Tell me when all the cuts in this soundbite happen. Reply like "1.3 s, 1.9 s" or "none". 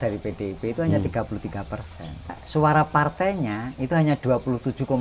2.4 s